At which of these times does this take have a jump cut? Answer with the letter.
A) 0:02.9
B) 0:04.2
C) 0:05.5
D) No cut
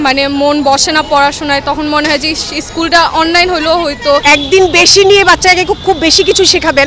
B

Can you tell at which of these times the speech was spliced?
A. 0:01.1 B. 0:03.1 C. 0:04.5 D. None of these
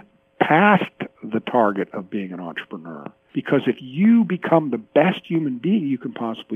B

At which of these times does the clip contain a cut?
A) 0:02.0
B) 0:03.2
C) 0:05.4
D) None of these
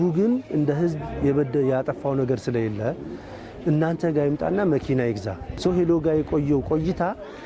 C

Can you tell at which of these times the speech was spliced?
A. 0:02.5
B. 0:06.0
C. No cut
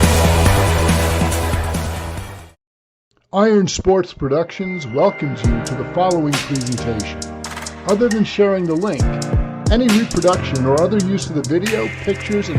A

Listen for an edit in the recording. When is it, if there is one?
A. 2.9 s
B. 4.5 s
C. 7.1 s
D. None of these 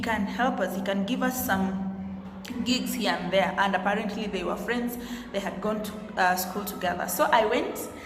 D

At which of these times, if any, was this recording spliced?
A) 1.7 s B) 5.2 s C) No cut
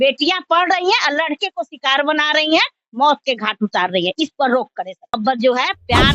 B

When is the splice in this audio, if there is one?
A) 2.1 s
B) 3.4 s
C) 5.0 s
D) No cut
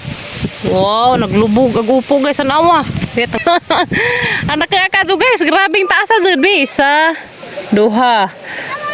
B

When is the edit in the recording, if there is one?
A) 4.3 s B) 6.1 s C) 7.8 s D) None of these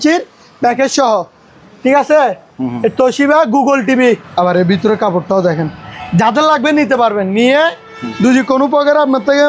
A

